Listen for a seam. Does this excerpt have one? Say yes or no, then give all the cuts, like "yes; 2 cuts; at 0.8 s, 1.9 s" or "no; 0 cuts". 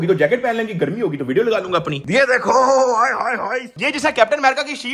yes; 2 cuts; at 2.0 s, 3.7 s